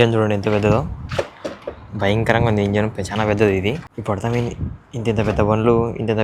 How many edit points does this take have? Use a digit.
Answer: 1